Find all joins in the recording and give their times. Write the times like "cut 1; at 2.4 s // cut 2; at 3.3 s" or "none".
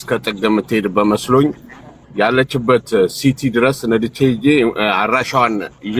none